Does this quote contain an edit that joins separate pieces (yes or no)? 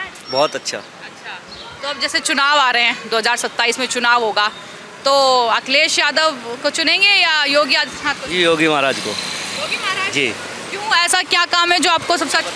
no